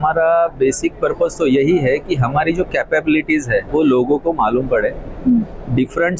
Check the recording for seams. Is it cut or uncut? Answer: cut